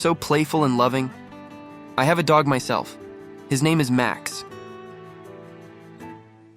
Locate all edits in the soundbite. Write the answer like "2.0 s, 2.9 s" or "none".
4.2 s